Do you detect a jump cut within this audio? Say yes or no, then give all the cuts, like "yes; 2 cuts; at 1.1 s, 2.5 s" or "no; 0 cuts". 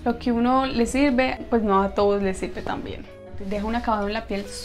yes; 2 cuts; at 1.4 s, 3.2 s